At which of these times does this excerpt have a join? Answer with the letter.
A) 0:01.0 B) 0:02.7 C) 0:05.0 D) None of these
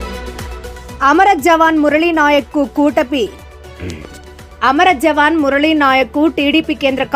A